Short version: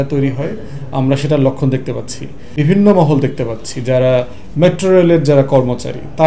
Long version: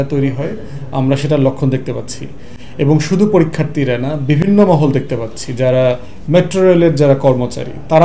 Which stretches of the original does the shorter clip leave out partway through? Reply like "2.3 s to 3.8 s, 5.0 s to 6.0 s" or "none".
2.5 s to 4.2 s